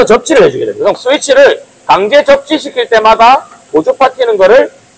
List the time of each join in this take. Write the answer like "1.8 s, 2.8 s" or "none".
1.0 s